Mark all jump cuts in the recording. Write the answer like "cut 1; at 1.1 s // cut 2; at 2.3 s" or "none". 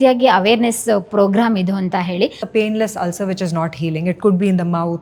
cut 1; at 2.4 s